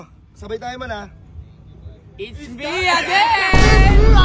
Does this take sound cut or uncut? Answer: uncut